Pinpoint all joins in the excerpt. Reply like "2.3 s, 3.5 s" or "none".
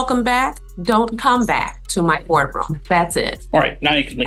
none